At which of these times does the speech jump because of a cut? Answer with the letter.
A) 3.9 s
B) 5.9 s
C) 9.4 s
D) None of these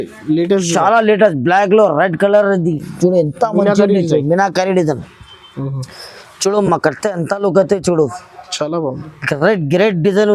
D